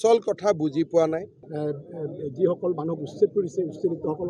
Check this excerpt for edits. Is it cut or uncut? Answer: cut